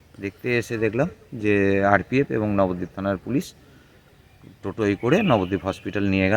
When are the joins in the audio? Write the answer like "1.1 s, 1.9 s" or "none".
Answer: none